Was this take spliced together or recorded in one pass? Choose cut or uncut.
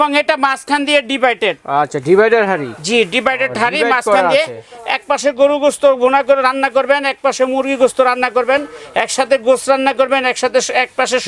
uncut